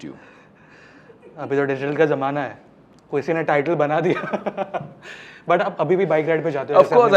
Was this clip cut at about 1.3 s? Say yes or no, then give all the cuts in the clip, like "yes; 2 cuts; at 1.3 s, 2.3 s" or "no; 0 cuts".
no; 0 cuts